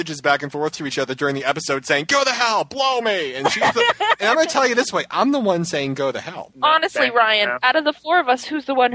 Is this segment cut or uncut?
cut